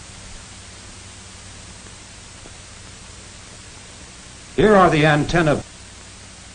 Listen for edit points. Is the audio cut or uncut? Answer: uncut